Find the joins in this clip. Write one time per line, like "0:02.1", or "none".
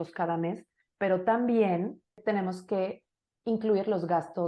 0:00.8
0:02.2